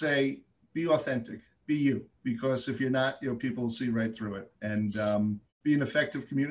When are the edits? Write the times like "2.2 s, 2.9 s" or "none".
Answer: 5.5 s